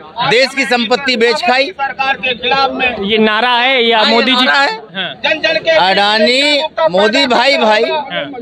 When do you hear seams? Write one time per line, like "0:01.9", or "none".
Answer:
none